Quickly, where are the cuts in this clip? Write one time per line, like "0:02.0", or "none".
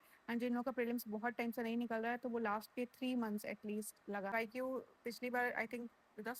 0:04.3